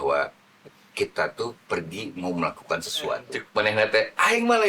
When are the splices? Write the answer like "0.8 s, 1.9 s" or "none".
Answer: 3.4 s